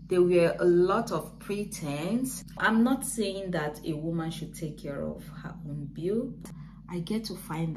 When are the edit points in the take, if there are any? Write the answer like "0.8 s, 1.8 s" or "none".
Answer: 2.6 s, 6.4 s